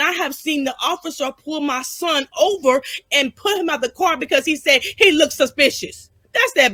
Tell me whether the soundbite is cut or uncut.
uncut